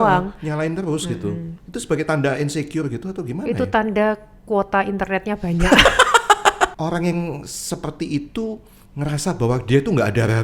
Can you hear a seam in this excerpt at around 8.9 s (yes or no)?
no